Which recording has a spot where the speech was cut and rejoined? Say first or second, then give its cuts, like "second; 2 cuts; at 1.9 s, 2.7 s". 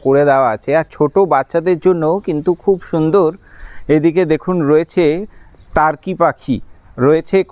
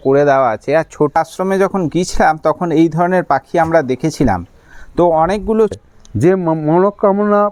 second; 2 cuts; at 1.2 s, 5.8 s